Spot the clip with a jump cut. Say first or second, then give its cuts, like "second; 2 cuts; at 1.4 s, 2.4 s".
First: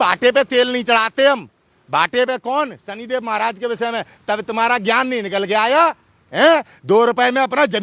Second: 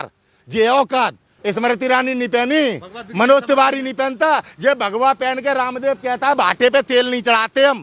second; 1 cut; at 1.3 s